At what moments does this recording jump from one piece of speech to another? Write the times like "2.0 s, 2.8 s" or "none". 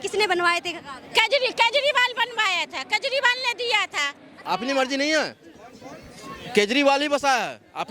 4.4 s